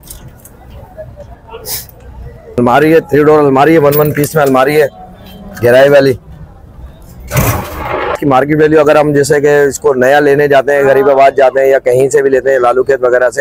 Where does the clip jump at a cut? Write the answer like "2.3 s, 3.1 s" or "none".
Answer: 2.6 s, 8.2 s